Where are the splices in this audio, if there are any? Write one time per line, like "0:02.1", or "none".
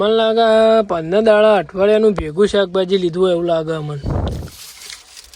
none